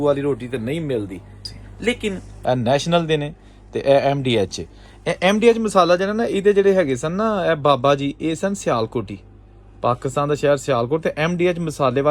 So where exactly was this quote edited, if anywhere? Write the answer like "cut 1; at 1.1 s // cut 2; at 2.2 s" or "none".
cut 1; at 2.3 s